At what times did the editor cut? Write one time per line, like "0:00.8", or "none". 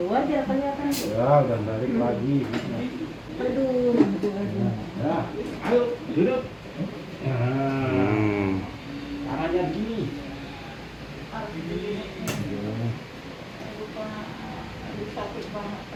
none